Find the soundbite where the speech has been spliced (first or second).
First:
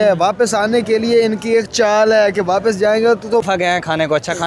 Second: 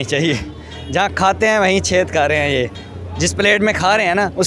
first